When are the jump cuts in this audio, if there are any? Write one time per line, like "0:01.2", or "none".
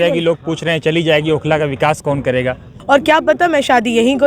0:02.7